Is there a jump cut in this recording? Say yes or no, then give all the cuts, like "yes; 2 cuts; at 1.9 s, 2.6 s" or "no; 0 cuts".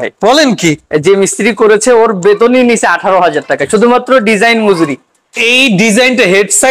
no; 0 cuts